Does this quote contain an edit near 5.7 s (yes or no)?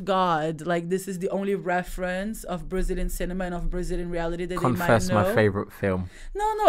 no